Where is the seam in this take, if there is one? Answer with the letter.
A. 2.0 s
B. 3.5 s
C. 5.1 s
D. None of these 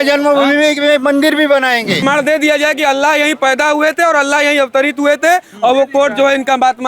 A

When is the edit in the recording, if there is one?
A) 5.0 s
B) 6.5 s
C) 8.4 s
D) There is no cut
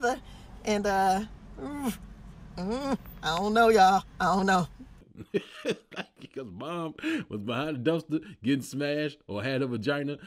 A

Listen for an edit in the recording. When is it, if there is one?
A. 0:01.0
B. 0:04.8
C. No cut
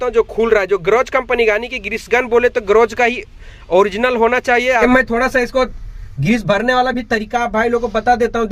B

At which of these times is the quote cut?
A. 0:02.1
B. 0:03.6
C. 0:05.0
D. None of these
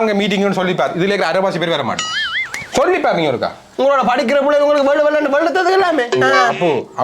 B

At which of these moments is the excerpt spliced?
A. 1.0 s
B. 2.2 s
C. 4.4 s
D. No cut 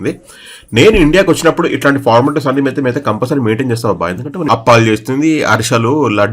C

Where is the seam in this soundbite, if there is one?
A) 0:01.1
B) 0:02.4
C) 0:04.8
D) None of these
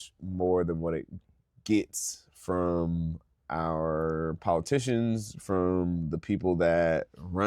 D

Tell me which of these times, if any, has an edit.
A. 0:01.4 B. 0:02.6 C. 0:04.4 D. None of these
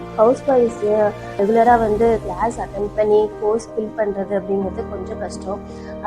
A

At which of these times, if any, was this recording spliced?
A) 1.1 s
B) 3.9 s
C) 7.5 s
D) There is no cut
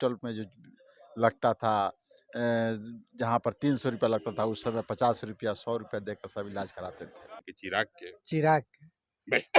C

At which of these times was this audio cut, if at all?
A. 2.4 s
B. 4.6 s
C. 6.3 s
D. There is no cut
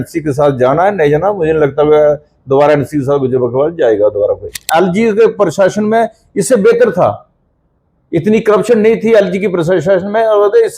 B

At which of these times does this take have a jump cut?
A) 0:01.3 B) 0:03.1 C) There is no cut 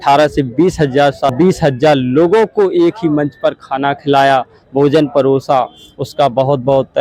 A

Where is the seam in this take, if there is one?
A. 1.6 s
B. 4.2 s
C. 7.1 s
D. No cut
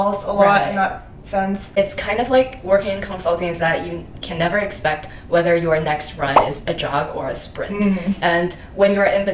A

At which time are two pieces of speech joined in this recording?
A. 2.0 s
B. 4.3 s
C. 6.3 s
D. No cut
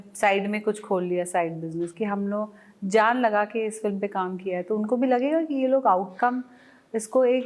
D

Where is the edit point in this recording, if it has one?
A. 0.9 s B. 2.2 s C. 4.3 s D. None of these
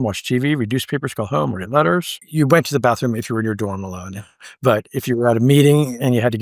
B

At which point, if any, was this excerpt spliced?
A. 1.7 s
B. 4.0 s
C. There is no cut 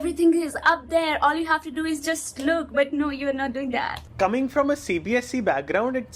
B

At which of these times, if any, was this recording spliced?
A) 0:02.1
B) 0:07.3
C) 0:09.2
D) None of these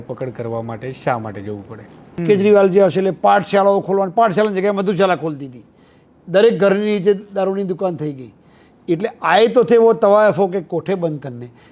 A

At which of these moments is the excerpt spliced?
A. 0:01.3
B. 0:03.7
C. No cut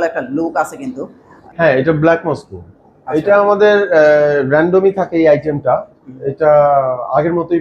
A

